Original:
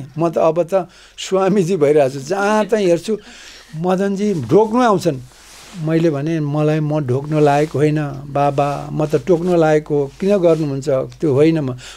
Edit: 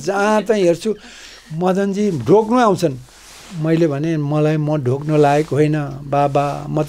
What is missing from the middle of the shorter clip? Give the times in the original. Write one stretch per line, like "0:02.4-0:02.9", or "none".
none